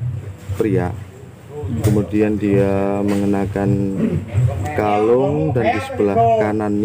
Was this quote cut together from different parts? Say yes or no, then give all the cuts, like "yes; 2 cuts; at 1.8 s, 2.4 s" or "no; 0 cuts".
no; 0 cuts